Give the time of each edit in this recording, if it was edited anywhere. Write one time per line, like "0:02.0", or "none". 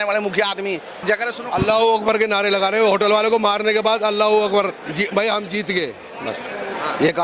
0:01.0